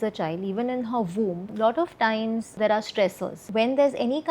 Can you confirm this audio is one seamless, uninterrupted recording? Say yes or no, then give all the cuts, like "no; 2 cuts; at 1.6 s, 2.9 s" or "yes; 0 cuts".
no; 3 cuts; at 1.5 s, 2.5 s, 3.4 s